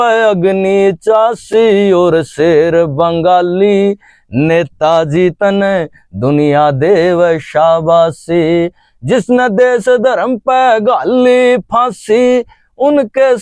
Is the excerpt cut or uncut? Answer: uncut